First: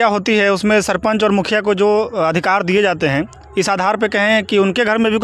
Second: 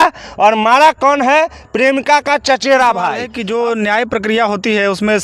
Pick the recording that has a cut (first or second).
second